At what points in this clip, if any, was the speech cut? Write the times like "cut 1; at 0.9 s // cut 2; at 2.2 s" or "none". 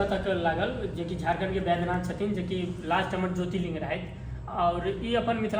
none